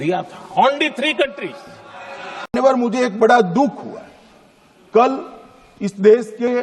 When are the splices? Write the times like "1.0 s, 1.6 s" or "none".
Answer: 2.3 s